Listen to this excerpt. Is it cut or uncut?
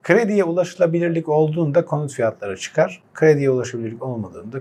uncut